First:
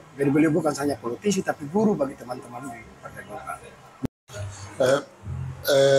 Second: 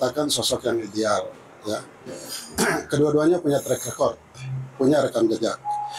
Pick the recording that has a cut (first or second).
first